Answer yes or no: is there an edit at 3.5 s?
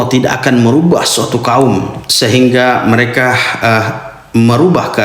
no